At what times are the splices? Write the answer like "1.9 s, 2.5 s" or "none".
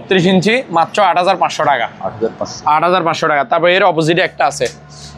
none